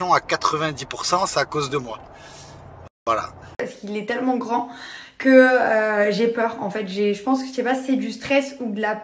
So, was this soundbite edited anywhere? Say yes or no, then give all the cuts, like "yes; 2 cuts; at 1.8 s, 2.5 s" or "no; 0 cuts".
yes; 1 cut; at 3.4 s